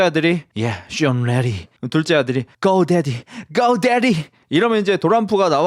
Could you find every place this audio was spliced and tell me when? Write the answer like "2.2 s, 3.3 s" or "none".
2.5 s